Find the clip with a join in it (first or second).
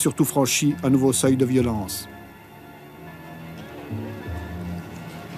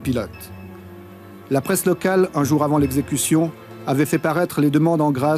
first